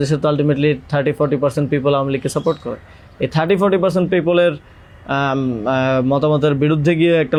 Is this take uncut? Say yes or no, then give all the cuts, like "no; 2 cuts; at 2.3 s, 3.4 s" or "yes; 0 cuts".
yes; 0 cuts